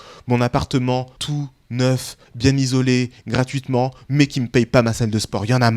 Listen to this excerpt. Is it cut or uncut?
cut